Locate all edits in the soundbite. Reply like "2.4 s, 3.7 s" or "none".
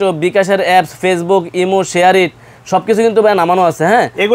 none